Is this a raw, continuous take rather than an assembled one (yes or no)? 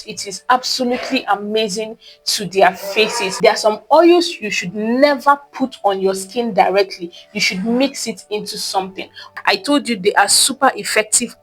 no